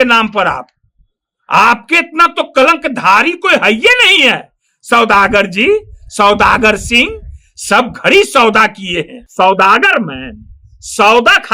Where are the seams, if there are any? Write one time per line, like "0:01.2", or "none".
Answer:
0:09.2